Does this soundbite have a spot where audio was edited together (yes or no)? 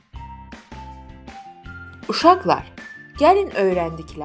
no